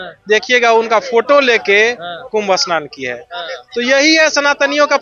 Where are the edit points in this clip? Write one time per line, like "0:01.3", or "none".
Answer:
none